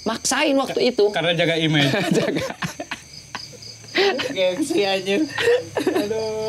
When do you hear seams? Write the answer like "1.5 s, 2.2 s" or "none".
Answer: none